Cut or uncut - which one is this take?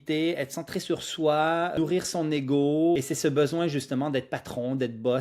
cut